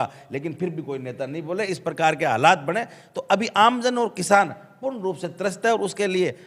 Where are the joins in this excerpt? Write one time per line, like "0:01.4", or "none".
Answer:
none